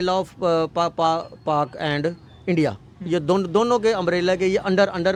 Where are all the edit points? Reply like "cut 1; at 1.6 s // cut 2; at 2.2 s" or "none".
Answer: none